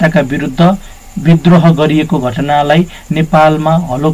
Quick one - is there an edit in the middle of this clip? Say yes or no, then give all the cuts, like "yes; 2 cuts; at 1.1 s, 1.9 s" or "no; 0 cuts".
no; 0 cuts